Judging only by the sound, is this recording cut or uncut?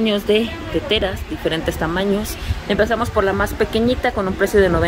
uncut